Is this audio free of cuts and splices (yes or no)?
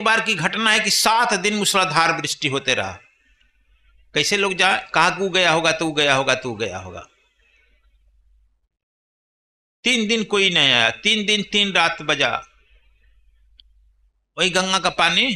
yes